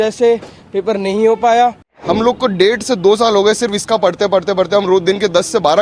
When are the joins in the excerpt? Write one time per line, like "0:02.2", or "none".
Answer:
0:01.9